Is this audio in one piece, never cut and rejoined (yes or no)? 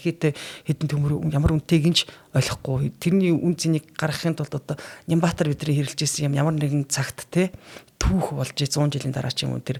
yes